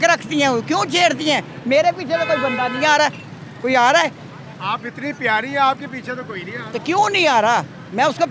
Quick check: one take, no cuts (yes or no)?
yes